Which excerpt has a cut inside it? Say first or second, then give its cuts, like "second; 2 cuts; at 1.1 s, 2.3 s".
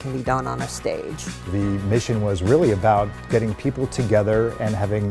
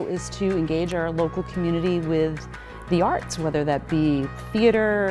first; 1 cut; at 1.5 s